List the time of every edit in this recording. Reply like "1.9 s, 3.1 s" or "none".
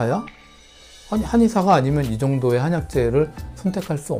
none